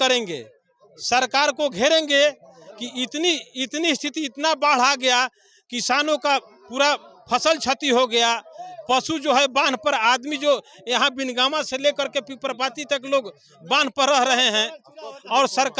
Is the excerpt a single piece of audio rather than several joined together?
yes; 0 cuts

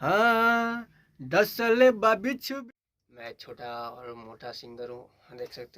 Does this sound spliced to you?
yes; 1 cut; at 2.5 s

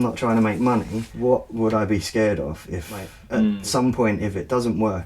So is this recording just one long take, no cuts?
no; 2 cuts; at 1.0 s, 3.3 s

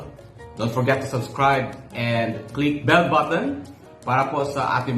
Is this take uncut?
no; 1 cut; at 2.8 s

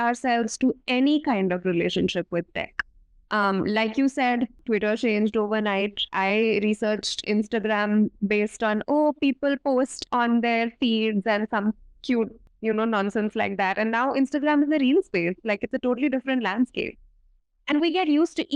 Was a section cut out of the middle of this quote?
yes; 2 cuts; at 4.6 s, 12.4 s

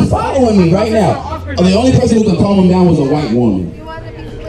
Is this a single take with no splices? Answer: yes; 0 cuts

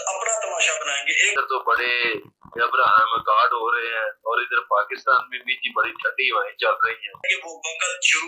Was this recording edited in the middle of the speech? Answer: yes; 2 cuts; at 1.3 s, 7.3 s

